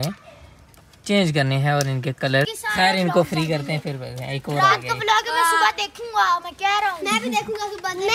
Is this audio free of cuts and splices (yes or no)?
no